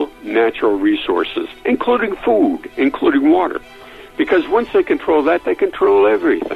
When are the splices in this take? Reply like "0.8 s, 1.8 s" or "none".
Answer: none